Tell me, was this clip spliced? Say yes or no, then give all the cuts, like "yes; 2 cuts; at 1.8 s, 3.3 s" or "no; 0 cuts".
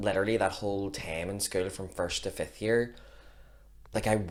no; 0 cuts